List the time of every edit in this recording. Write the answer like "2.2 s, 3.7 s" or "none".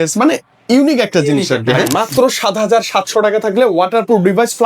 1.9 s